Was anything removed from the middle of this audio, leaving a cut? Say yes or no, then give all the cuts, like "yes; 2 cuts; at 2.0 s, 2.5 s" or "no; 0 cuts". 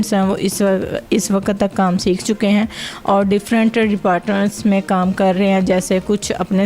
no; 0 cuts